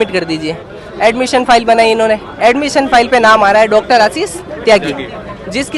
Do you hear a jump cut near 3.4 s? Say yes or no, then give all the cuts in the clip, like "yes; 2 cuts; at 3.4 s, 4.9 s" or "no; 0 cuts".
no; 0 cuts